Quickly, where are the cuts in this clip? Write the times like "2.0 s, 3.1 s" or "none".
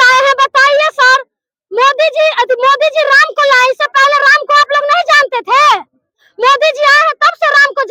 none